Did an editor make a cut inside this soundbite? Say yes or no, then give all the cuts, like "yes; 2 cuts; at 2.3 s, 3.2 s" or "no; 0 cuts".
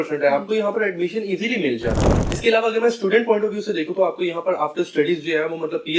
yes; 1 cut; at 2.1 s